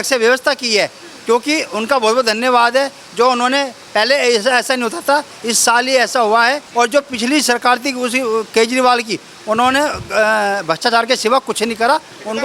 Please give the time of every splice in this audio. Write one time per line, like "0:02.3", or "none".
0:06.6